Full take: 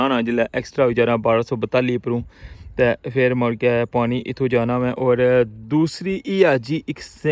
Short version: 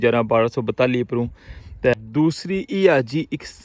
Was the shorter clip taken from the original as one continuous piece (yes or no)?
no